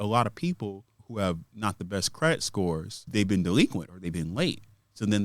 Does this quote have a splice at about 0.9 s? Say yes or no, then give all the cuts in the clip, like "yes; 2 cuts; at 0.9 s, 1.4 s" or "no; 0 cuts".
yes; 2 cuts; at 0.9 s, 3.0 s